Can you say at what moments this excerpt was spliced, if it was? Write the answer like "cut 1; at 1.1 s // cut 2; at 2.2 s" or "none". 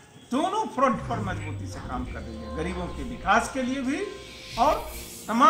none